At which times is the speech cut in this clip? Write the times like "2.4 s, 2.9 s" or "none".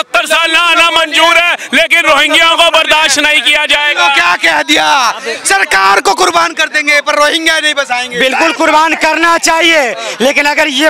none